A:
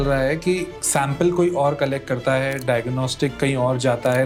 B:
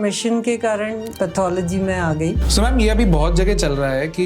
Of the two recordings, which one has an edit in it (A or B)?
B